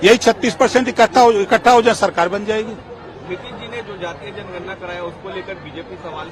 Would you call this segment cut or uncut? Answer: uncut